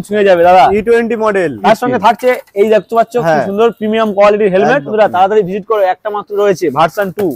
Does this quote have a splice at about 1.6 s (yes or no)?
yes